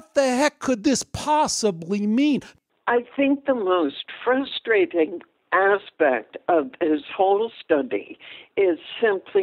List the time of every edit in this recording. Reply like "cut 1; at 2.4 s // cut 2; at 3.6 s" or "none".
cut 1; at 2.5 s